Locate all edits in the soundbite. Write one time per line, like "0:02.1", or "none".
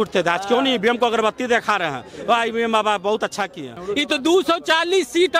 0:03.8